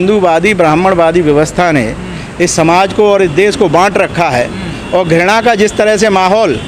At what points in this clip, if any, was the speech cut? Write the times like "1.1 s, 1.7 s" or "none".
none

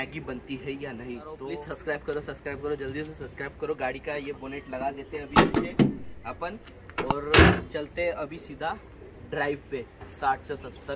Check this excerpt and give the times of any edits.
1.4 s

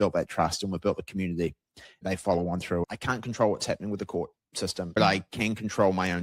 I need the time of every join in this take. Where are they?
2.0 s, 2.8 s, 5.0 s

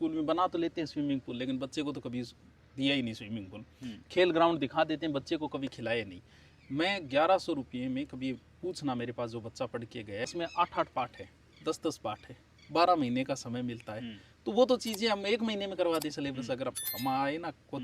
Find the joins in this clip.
10.3 s

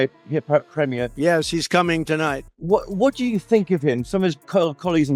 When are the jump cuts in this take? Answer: none

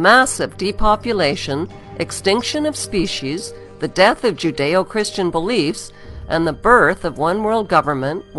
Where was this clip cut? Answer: none

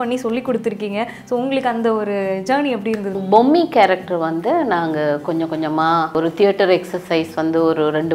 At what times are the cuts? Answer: 3.2 s, 6.1 s

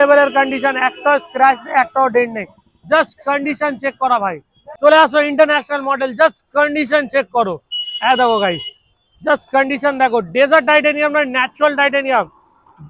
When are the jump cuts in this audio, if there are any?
4.6 s

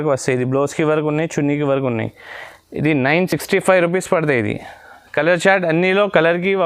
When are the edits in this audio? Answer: none

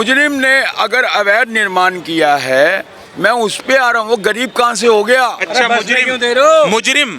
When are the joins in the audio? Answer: none

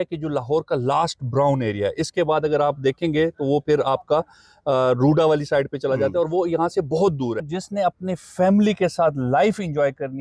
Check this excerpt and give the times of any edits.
7.4 s

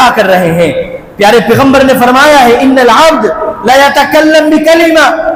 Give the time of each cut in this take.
none

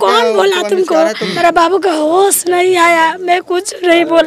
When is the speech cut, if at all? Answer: 1.3 s

